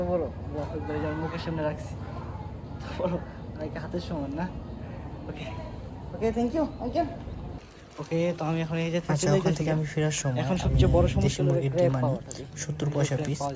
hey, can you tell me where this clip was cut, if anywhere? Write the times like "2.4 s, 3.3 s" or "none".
none